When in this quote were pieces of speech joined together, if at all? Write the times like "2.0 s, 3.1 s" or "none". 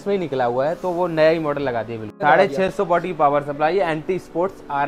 2.1 s